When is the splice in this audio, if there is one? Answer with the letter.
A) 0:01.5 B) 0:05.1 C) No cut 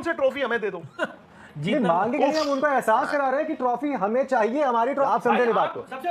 B